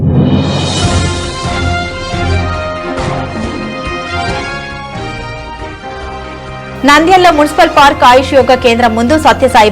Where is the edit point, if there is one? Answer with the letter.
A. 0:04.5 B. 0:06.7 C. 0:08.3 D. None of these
B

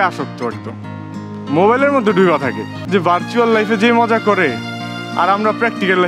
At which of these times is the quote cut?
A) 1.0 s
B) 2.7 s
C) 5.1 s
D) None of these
B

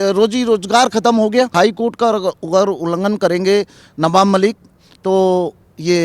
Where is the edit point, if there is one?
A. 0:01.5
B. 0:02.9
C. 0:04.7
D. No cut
A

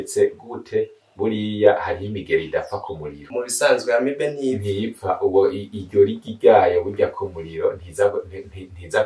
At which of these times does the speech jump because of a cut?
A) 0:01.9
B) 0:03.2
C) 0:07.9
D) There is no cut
B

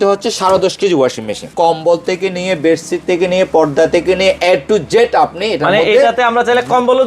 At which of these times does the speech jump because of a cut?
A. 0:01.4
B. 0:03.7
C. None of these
A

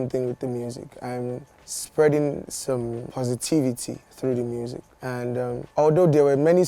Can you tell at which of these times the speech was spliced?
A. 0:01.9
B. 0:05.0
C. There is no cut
C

